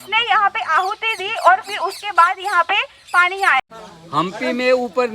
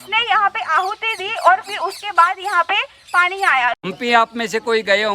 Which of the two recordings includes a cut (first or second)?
first